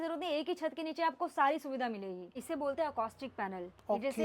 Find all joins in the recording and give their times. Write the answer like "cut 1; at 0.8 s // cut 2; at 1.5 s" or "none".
cut 1; at 2.4 s